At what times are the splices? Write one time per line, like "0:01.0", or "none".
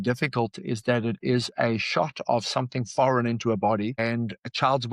none